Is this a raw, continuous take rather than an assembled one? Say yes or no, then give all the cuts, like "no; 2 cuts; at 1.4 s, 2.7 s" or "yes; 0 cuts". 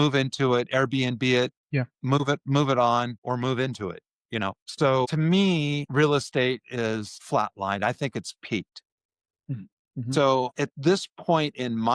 no; 6 cuts; at 1.6 s, 3.2 s, 4.7 s, 5.8 s, 7.1 s, 10.5 s